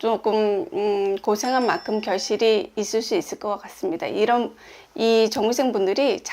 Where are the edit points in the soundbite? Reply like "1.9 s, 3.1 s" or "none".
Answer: none